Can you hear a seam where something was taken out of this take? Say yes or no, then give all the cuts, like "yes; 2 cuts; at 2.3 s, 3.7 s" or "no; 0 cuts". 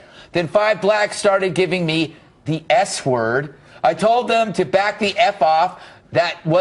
yes; 1 cut; at 2.1 s